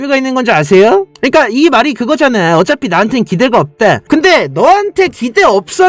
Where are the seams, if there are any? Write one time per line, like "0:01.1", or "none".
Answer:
0:01.1

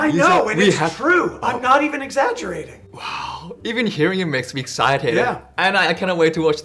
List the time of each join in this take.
none

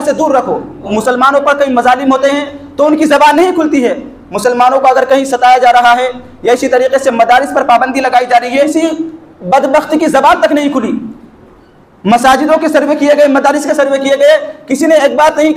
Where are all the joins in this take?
0:00.8
0:08.7

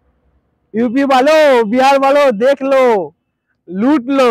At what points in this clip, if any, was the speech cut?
none

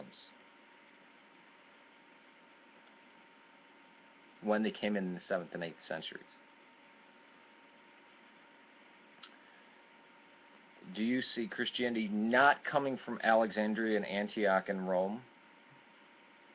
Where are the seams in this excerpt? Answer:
0:03.5

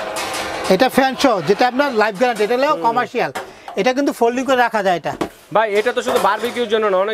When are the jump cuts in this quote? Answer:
none

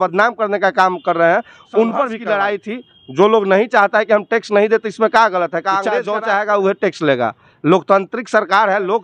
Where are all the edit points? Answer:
0:02.2
0:06.0

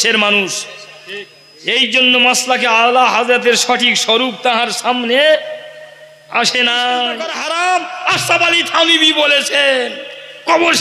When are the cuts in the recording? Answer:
0:07.3

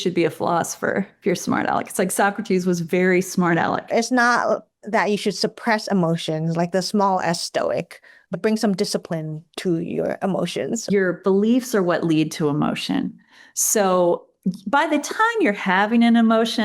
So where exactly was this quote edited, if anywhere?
0:03.9
0:08.3
0:10.9

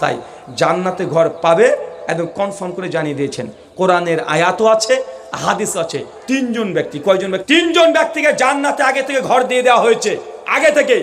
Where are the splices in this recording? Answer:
0:07.4

